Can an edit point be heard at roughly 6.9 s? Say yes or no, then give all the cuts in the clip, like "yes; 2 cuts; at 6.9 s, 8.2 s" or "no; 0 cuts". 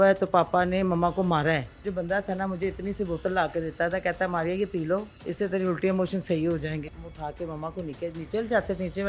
yes; 2 cuts; at 1.8 s, 6.9 s